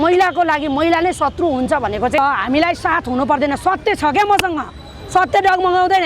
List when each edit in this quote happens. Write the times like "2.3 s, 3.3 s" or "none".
2.2 s